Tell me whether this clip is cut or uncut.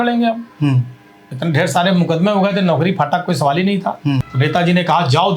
cut